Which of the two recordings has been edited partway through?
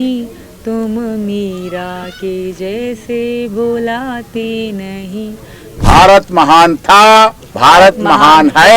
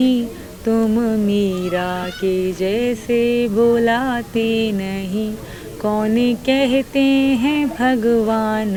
first; 2 cuts; at 5.8 s, 7.8 s

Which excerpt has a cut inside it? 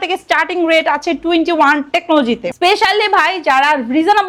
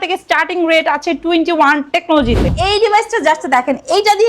second; 1 cut; at 2.5 s

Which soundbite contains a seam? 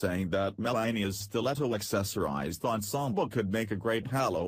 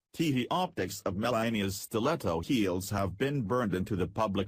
second; 1 cut; at 3.6 s

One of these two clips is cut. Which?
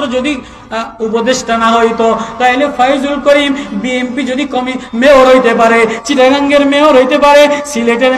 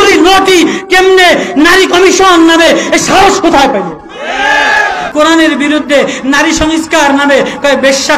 second; 1 cut; at 5.0 s

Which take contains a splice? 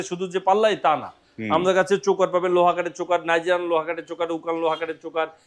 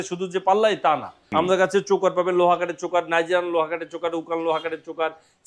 second; 1 cut; at 1.2 s

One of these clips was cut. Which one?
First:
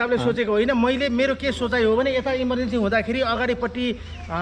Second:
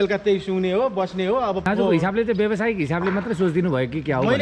second; 1 cut; at 1.6 s

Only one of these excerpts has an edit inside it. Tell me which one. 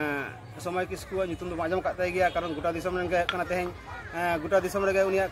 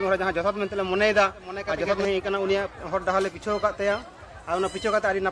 second; 1 cut; at 2.0 s

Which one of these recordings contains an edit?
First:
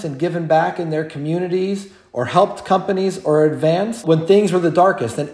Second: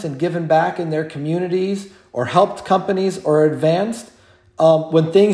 first; 1 cut; at 4.0 s

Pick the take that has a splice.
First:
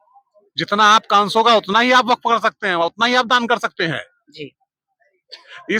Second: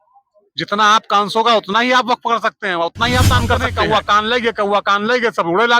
second; 1 cut; at 3.7 s

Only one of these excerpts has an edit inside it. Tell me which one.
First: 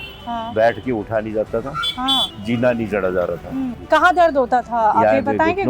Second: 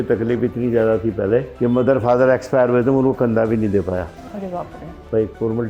first; 2 cuts; at 2.3 s, 3.8 s

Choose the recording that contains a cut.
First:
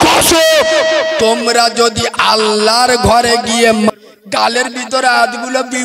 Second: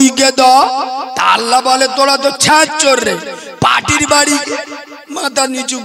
first; 1 cut; at 3.9 s

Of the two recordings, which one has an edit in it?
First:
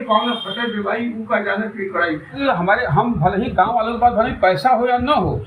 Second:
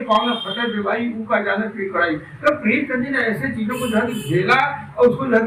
first; 1 cut; at 2.4 s

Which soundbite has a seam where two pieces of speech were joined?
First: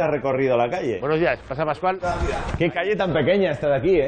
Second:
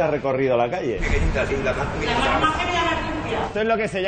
second; 1 cut; at 1.0 s

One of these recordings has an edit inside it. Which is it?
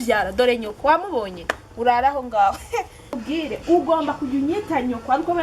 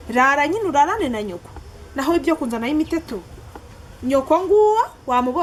first; 1 cut; at 3.2 s

